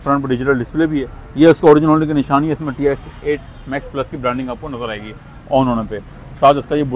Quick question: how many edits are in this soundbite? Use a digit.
0